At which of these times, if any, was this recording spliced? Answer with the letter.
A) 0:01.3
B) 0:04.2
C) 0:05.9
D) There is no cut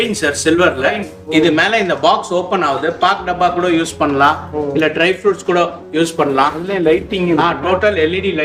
D